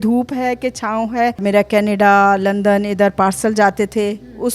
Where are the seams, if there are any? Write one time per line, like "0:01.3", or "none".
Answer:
0:01.4